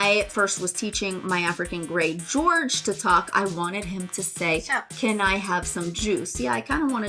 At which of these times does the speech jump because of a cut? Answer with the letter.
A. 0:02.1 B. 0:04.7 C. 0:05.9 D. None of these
D